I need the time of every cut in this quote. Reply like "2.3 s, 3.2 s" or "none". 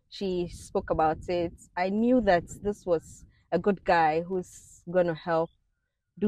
none